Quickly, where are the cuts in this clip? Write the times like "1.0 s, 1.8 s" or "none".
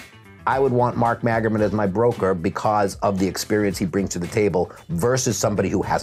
none